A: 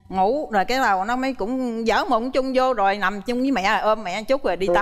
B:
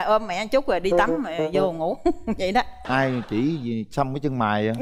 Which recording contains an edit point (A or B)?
B